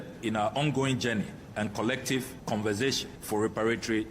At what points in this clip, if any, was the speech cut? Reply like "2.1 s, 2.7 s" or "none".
2.3 s, 3.1 s